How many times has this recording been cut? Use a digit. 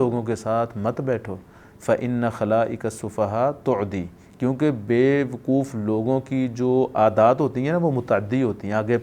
0